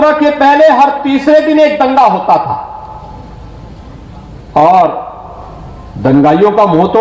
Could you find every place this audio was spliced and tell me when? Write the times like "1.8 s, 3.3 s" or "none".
none